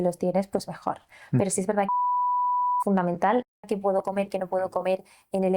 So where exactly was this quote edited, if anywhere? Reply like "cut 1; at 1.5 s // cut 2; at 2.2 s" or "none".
cut 1; at 3.7 s